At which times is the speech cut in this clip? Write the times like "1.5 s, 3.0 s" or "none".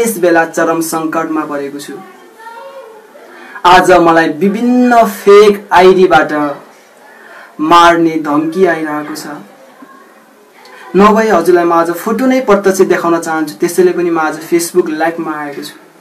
none